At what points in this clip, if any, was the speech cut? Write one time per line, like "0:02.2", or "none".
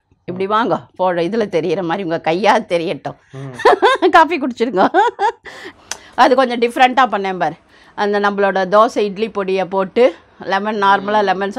0:05.6